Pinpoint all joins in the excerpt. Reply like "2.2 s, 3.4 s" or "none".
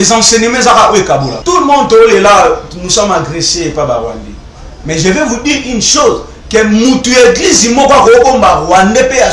1.3 s